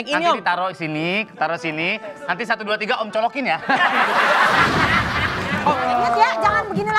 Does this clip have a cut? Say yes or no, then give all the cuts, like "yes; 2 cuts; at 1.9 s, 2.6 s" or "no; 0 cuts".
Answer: yes; 1 cut; at 5.5 s